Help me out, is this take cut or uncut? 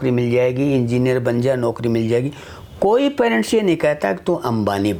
uncut